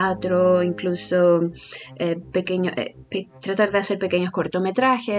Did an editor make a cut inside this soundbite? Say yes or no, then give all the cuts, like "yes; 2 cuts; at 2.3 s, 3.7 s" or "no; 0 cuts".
no; 0 cuts